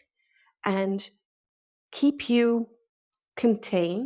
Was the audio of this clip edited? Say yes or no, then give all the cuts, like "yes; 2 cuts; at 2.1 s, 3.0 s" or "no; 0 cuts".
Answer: no; 0 cuts